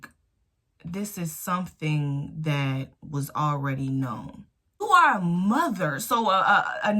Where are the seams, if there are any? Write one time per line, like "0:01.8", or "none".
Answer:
0:04.8